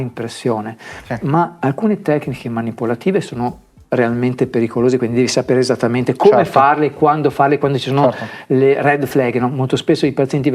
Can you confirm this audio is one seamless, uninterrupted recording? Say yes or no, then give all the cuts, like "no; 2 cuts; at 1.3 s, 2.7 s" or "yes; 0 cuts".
yes; 0 cuts